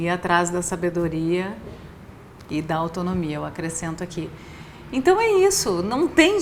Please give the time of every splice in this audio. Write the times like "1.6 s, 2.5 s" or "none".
none

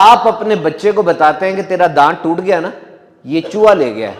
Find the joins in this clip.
none

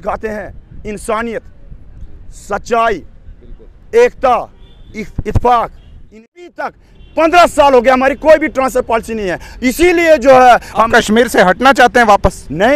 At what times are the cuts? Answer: 6.4 s

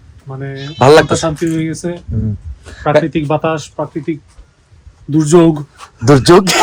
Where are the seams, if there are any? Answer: none

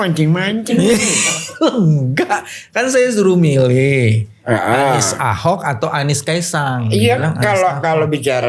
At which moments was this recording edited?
none

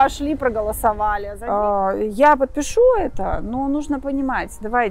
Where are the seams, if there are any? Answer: 1.3 s

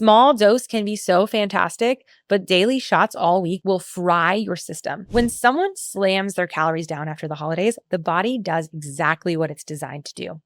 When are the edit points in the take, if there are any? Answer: 5.1 s

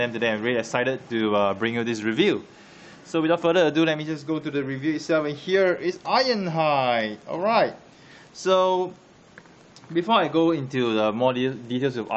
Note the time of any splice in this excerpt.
10.8 s

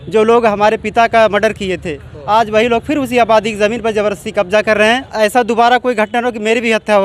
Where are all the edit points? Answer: 5.1 s

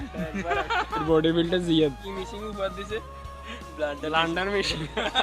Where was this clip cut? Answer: 1.0 s

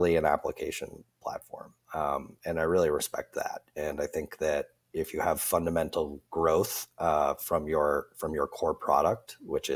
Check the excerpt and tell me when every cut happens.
none

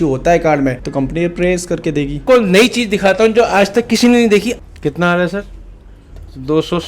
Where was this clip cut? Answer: 2.2 s, 4.6 s

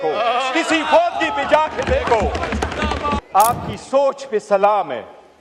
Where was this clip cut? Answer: 3.2 s

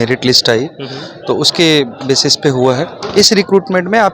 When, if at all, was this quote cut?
3.0 s

